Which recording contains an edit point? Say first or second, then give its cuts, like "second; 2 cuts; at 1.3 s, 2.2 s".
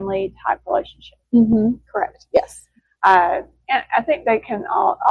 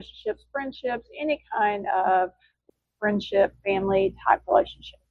second; 1 cut; at 2.6 s